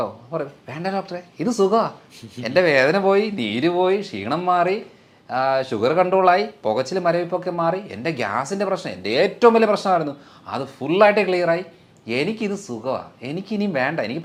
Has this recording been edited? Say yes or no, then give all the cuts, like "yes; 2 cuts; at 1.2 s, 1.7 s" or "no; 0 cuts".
no; 0 cuts